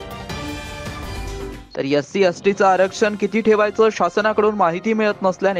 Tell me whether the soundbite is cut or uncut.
uncut